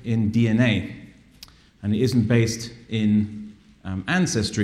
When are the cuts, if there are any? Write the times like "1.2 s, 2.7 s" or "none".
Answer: none